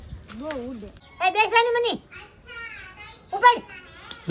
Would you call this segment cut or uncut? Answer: cut